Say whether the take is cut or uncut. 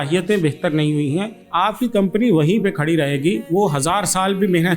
cut